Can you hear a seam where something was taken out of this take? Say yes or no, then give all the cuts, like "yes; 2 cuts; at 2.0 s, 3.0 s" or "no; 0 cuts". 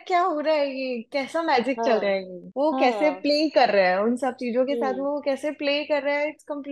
no; 0 cuts